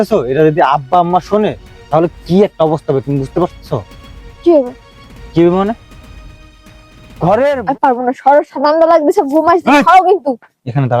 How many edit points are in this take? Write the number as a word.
one